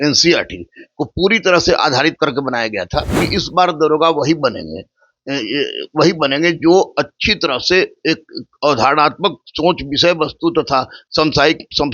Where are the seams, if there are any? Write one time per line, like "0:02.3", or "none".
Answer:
0:03.2